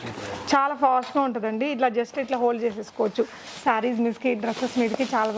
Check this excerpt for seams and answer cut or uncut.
uncut